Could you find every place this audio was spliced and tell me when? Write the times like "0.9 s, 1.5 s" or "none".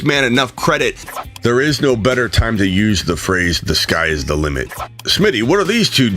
1.2 s, 4.7 s